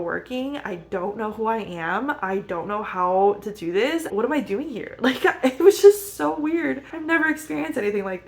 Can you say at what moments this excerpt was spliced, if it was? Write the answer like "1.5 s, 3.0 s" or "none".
4.1 s, 6.9 s